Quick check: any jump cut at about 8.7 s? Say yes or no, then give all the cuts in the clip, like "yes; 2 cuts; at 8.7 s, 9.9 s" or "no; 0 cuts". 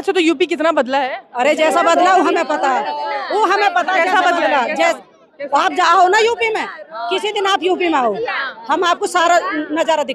no; 0 cuts